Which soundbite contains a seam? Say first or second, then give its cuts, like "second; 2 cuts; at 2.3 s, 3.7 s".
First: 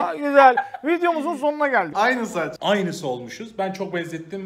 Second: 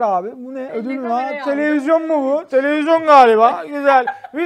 first; 1 cut; at 1.9 s